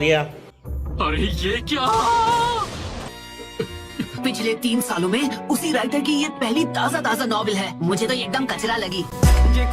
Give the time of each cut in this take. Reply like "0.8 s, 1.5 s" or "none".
3.1 s